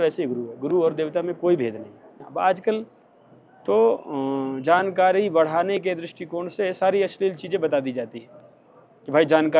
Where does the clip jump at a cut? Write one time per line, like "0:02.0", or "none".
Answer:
0:02.1